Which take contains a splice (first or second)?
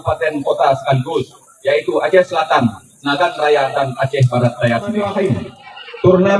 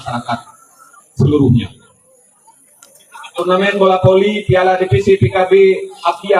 first